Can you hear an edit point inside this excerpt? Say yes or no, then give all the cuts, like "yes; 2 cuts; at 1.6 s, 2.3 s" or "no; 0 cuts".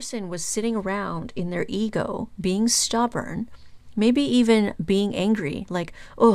no; 0 cuts